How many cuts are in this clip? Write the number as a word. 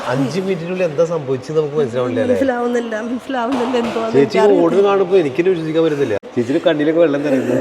one